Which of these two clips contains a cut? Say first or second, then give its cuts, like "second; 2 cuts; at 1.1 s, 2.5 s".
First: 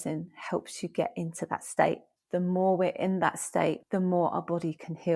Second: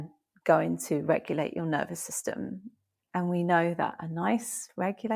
first; 2 cuts; at 2.1 s, 3.8 s